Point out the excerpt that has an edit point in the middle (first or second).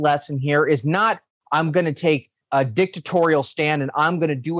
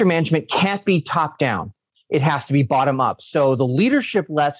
first